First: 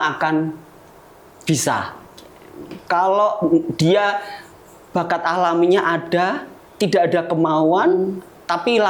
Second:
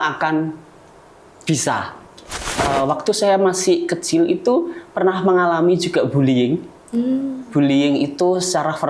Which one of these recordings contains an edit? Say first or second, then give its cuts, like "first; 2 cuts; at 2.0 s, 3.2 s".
second; 1 cut; at 2.6 s